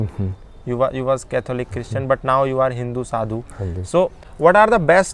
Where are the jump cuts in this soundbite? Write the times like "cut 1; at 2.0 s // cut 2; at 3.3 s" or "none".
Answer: none